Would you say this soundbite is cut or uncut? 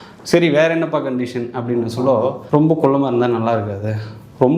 cut